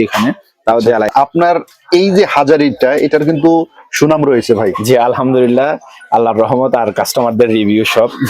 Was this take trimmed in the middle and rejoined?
yes; 1 cut; at 1.1 s

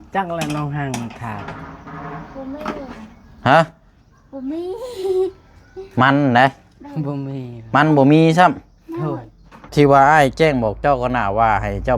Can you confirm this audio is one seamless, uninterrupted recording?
no; 1 cut; at 9.6 s

